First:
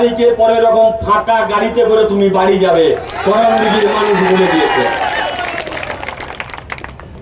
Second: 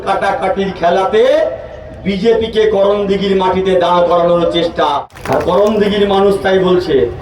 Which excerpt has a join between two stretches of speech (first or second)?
second